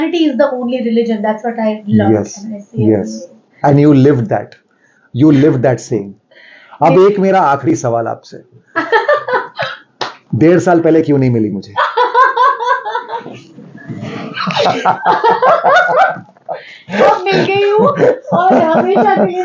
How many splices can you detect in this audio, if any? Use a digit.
0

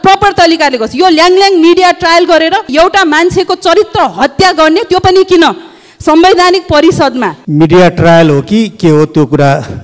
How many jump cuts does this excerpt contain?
2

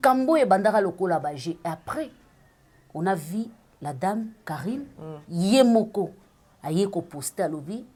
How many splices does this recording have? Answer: 0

